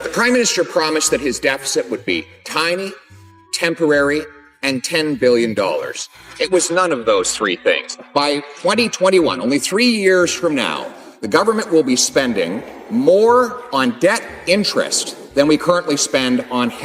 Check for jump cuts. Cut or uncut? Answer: uncut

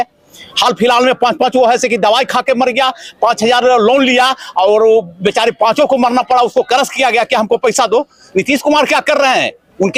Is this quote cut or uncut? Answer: uncut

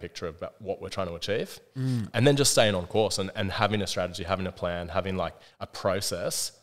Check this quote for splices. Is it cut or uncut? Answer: cut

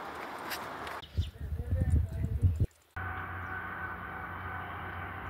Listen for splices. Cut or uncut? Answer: uncut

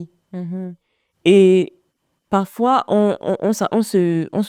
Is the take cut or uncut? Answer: uncut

